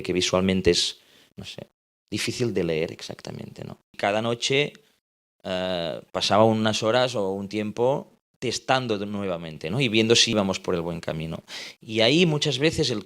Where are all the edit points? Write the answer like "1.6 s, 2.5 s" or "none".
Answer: 3.9 s, 8.2 s